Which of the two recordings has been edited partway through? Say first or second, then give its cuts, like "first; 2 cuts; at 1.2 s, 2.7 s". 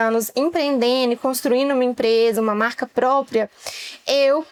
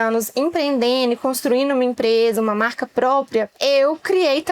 second; 1 cut; at 3.5 s